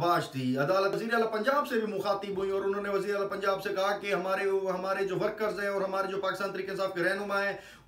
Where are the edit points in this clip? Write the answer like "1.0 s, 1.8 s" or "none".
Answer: 0.9 s

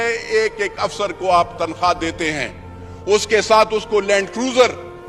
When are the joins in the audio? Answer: none

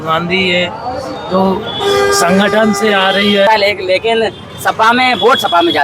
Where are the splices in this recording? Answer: 3.5 s

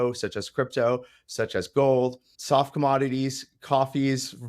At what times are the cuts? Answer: 2.3 s

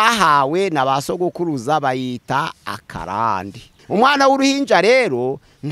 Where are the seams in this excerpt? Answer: 3.7 s

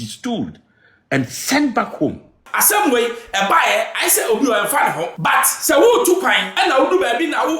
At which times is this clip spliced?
2.4 s, 5.1 s, 6.5 s

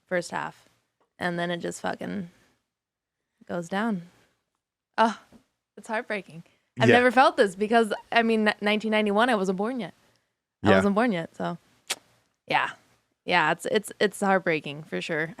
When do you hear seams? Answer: none

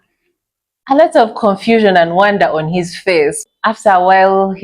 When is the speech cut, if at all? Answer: 3.4 s

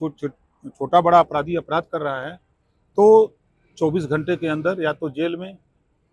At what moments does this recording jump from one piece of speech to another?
none

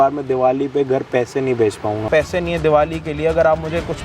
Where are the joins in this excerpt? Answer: 2.1 s

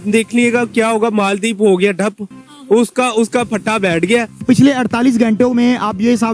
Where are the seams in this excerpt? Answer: 4.4 s

